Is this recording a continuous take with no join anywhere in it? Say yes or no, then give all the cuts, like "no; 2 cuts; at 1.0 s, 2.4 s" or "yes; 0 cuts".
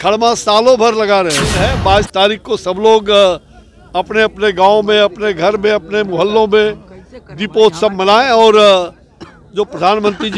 no; 1 cut; at 1.5 s